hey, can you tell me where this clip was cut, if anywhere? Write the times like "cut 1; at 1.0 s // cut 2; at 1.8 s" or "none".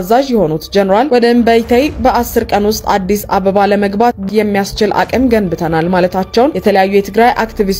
cut 1; at 4.2 s